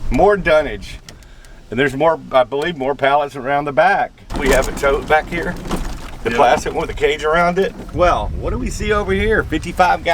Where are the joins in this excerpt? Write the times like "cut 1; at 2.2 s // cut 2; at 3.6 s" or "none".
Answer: cut 1; at 1.0 s // cut 2; at 4.3 s // cut 3; at 7.8 s